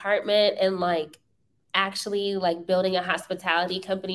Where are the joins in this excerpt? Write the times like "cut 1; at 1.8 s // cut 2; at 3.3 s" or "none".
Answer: none

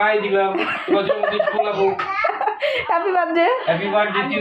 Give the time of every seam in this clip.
none

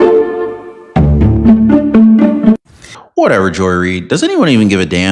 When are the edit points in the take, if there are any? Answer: cut 1; at 3.0 s

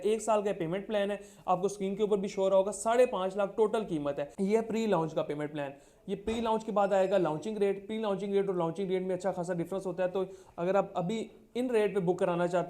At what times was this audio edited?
cut 1; at 4.3 s

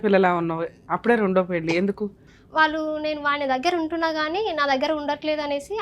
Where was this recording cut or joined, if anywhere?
cut 1; at 2.3 s

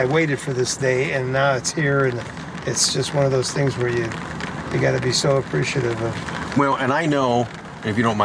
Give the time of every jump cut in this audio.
none

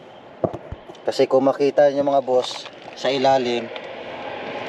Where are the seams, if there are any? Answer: none

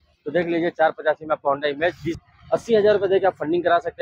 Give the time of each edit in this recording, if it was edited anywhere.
cut 1; at 2.2 s

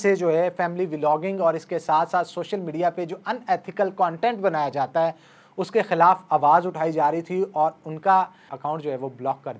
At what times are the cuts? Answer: cut 1; at 8.5 s

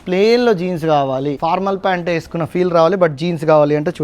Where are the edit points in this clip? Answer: cut 1; at 1.4 s

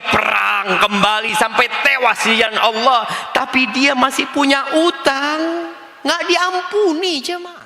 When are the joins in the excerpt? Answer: none

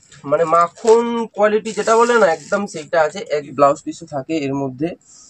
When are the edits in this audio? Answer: cut 1; at 3.5 s

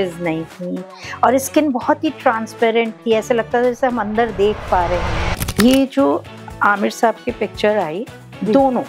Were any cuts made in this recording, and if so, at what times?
cut 1; at 5.6 s

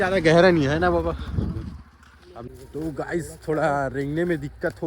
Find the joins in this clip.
cut 1; at 2.5 s

